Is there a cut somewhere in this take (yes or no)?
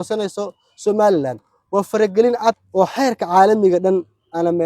yes